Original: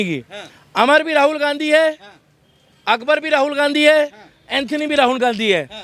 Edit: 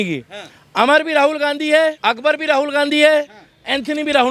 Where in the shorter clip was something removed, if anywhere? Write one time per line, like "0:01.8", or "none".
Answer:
0:02.0